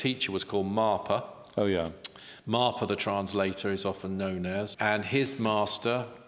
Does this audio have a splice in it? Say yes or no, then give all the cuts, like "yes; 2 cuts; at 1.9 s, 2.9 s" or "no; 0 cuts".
yes; 1 cut; at 4.7 s